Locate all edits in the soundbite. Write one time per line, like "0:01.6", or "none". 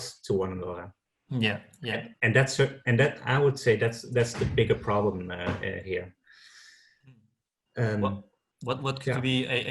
none